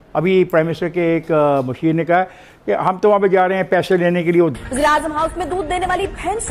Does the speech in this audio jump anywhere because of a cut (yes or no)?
yes